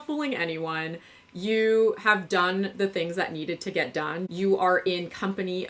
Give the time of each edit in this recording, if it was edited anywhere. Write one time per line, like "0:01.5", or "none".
none